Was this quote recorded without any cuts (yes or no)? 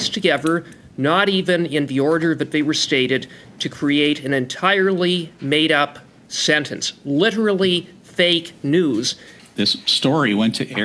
no